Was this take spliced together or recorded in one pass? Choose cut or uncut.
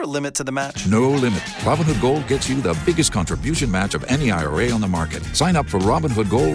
uncut